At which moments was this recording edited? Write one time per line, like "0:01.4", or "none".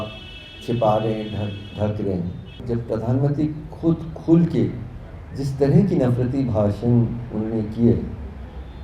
0:02.6